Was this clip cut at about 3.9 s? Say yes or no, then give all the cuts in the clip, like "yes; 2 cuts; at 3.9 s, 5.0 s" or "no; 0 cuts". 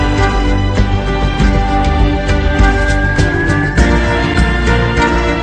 no; 1 cut; at 2.2 s